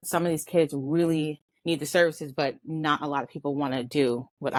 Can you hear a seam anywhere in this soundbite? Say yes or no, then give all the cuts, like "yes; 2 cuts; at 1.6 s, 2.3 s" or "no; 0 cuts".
no; 0 cuts